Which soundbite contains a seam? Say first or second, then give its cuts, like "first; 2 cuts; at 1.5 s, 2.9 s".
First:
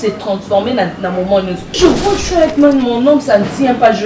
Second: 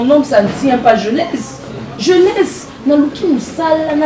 first; 1 cut; at 1.6 s